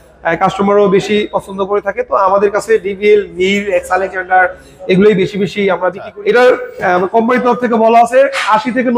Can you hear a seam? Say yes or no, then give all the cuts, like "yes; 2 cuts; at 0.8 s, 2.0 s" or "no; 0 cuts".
yes; 1 cut; at 6.1 s